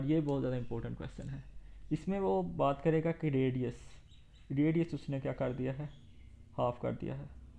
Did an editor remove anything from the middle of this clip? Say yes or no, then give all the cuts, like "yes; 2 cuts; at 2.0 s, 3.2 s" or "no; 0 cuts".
no; 0 cuts